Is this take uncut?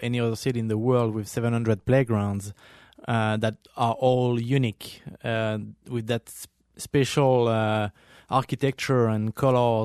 yes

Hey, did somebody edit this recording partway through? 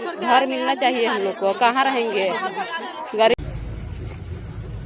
yes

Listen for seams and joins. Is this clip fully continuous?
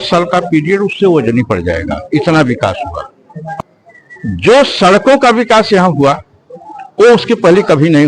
no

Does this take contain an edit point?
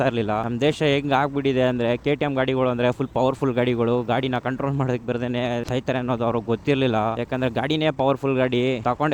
no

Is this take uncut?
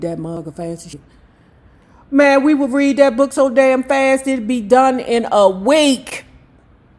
no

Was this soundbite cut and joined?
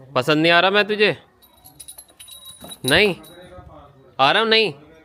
no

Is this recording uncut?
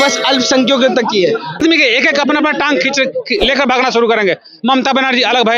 no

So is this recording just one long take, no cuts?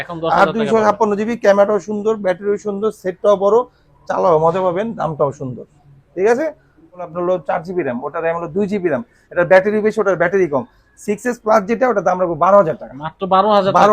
no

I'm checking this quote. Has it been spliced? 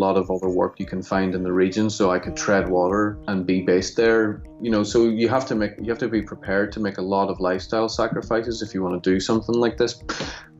yes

